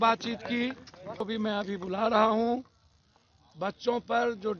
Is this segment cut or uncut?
cut